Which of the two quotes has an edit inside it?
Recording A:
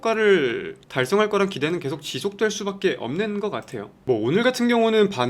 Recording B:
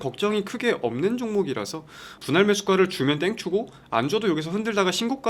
A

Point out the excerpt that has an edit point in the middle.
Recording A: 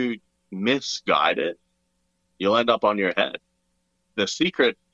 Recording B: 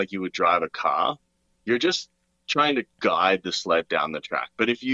A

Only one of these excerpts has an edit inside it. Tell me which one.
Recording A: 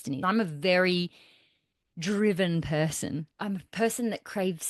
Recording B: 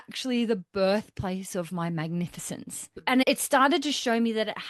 A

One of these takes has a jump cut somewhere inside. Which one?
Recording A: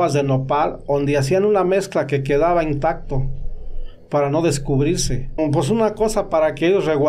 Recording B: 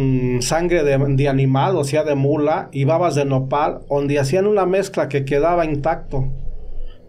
A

